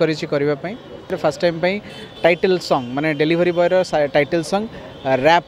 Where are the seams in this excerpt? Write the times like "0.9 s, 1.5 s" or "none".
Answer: 1.1 s